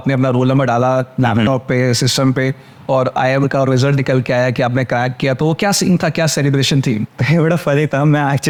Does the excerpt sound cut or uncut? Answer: uncut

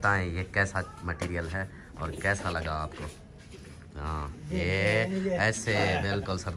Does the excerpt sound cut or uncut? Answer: uncut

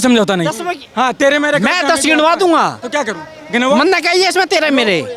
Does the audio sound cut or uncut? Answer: uncut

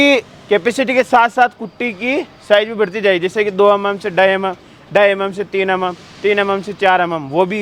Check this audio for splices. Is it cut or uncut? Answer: uncut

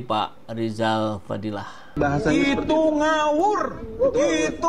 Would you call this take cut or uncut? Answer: cut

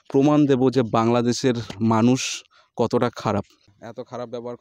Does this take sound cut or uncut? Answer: cut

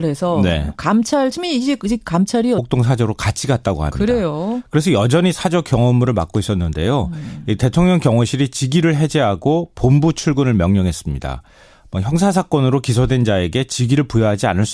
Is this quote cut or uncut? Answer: uncut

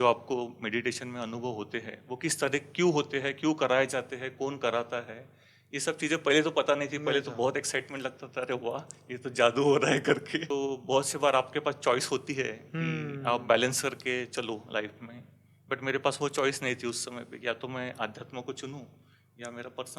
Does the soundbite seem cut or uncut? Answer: cut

